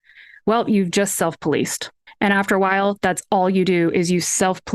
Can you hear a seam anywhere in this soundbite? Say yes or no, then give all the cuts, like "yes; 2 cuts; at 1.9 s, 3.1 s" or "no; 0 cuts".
yes; 1 cut; at 2.2 s